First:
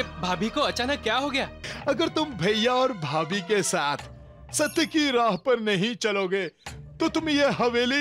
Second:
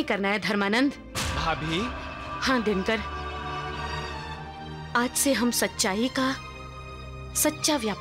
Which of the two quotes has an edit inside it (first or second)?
first